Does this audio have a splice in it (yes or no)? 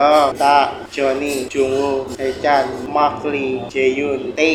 no